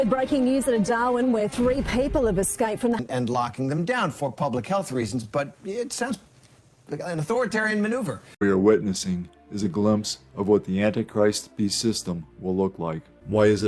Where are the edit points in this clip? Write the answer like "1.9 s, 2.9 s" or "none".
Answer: 3.0 s, 8.4 s

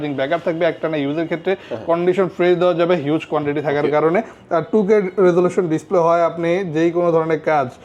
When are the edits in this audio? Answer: none

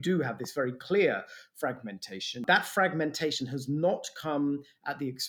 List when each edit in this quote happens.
2.4 s

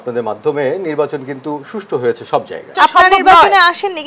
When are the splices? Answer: 2.8 s

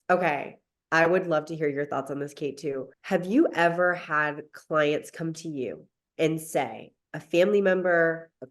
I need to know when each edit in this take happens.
2.9 s

